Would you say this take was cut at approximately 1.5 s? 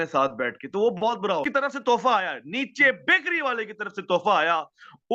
yes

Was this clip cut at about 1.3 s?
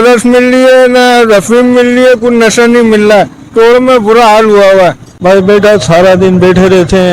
no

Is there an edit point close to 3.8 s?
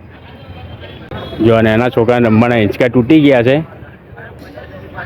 no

